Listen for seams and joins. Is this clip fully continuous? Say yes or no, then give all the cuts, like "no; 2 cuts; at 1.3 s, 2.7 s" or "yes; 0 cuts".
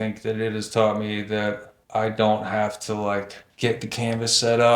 no; 2 cuts; at 1.7 s, 3.4 s